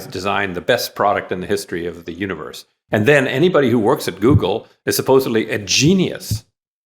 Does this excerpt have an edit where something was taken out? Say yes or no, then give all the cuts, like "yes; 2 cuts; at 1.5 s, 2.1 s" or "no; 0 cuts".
yes; 1 cut; at 2.0 s